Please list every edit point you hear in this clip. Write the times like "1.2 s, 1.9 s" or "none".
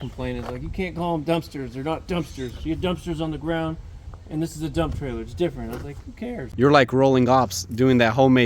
6.5 s